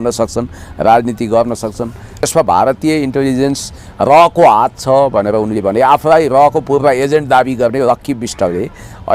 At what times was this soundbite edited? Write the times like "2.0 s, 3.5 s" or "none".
2.2 s

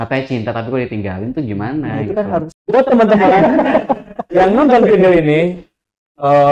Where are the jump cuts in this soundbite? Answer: 2.5 s

